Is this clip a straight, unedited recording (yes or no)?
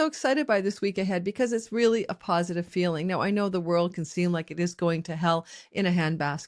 yes